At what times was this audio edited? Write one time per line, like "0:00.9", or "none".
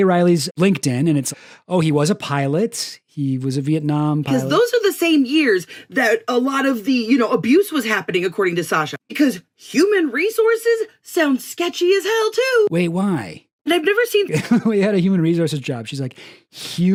none